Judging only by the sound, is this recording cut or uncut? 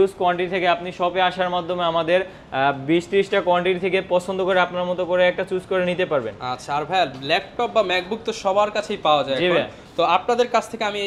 uncut